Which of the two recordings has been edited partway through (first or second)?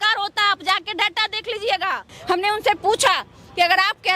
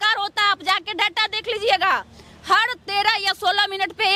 first